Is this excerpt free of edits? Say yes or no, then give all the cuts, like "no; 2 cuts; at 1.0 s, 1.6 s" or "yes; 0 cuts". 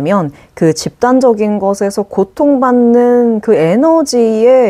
yes; 0 cuts